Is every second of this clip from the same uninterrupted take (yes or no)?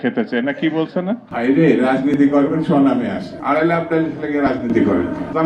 no